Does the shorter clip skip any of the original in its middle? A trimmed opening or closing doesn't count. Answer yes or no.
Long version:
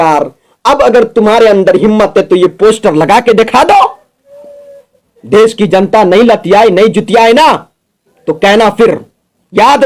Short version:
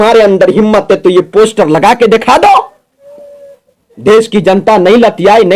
no